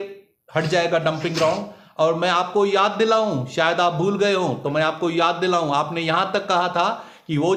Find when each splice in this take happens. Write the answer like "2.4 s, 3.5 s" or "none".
none